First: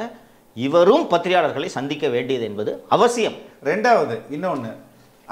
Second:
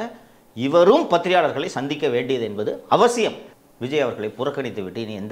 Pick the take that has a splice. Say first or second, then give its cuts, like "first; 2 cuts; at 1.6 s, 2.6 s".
second; 1 cut; at 3.5 s